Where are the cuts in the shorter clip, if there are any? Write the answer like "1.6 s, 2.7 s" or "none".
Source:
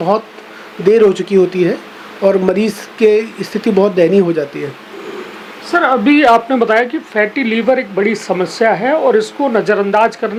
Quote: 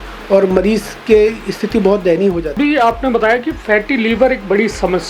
2.5 s